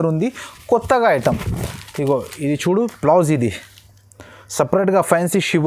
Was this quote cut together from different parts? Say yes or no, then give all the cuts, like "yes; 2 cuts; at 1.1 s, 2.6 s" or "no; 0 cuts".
no; 0 cuts